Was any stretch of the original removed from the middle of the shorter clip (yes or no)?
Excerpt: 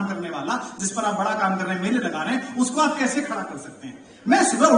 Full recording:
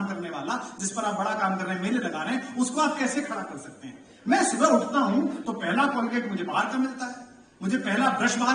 no